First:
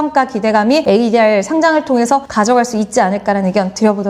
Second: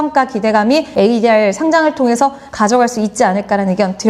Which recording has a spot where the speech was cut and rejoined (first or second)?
first